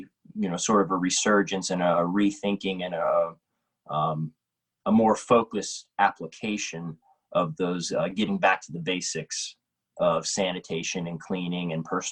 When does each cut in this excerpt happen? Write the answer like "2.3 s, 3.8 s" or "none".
none